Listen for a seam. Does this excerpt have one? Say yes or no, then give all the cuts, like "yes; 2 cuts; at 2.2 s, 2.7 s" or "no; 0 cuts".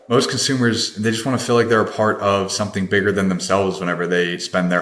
no; 0 cuts